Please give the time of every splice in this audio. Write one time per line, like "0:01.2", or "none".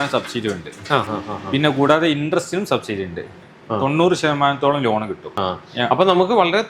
0:03.4
0:05.4